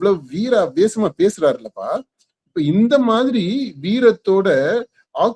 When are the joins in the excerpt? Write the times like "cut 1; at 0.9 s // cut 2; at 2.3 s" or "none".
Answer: none

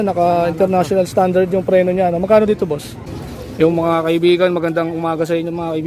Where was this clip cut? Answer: cut 1; at 3.4 s

